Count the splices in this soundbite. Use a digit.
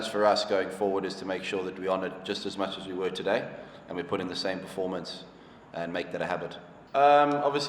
1